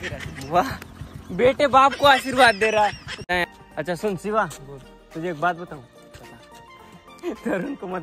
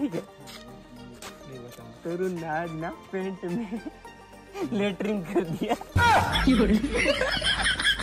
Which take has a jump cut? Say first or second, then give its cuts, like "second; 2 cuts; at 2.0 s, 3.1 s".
first; 1 cut; at 3.2 s